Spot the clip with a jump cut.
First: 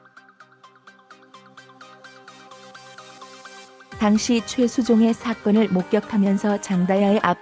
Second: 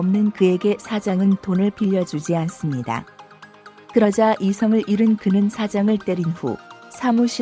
first; 1 cut; at 4.0 s

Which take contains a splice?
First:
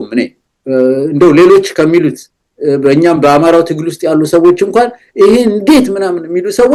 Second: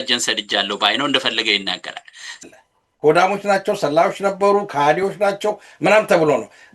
second; 1 cut; at 2.4 s

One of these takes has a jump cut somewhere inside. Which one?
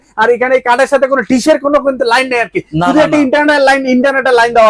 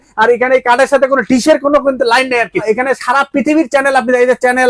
second; 1 cut; at 2.6 s

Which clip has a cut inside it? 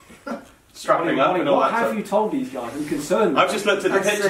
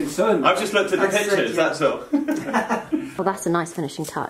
second; 1 cut; at 3.1 s

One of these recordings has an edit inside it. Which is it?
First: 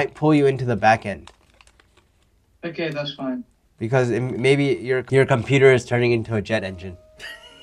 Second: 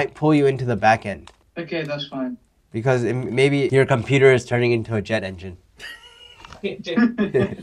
second; 2 cuts; at 1.4 s, 3.7 s

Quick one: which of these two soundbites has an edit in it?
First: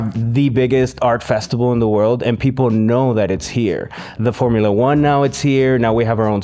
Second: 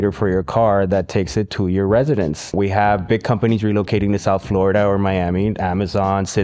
second; 1 cut; at 2.5 s

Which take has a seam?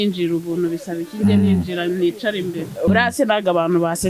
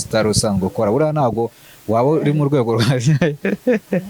first; 1 cut; at 2.9 s

